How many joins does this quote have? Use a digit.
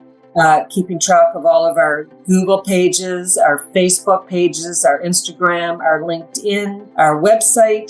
1